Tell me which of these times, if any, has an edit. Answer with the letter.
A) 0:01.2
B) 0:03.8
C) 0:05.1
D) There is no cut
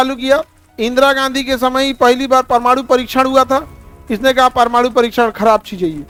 D